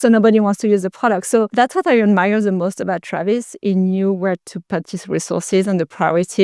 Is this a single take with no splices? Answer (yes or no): no